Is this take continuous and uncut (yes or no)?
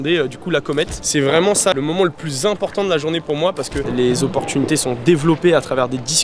no